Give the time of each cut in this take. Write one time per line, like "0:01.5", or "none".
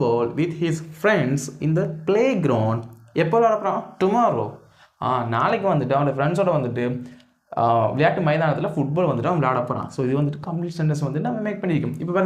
none